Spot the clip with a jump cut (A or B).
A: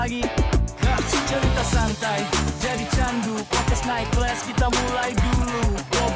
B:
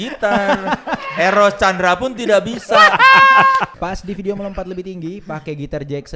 B